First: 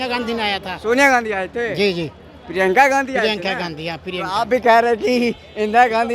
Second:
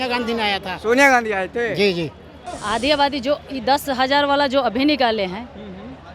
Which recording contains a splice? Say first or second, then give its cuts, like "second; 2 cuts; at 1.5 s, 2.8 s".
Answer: second; 1 cut; at 2.4 s